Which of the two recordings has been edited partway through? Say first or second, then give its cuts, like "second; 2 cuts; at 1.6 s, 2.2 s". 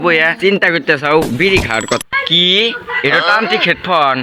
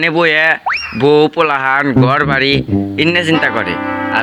first; 1 cut; at 2.0 s